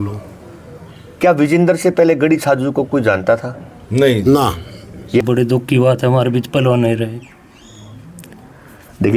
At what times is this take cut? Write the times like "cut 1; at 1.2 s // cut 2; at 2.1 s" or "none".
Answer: cut 1; at 5.2 s